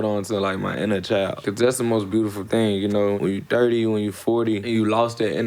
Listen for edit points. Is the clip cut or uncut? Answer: cut